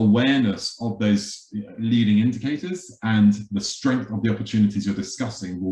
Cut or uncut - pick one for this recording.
uncut